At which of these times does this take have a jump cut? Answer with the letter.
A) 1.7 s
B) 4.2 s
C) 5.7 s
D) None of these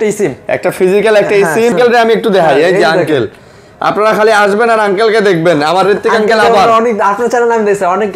A